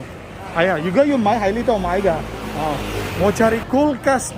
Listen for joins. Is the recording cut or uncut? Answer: cut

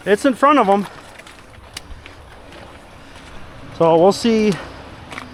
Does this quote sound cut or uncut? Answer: uncut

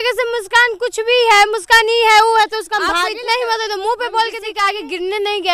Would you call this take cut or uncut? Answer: cut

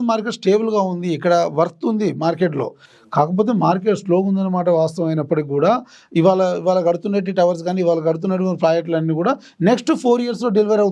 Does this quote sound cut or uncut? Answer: uncut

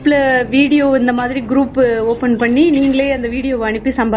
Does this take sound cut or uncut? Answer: uncut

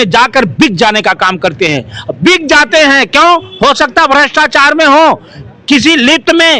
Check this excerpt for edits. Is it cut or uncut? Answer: uncut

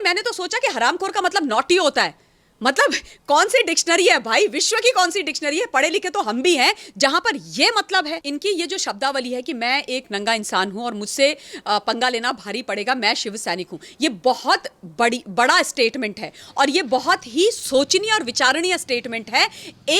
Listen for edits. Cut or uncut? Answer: cut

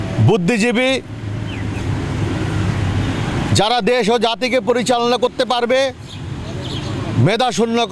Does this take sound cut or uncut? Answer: uncut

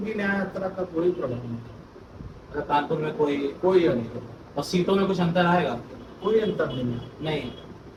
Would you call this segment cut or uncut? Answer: uncut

